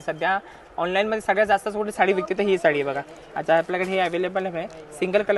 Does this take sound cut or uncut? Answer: uncut